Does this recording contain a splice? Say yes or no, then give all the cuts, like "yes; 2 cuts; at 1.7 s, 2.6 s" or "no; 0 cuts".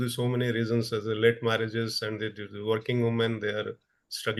no; 0 cuts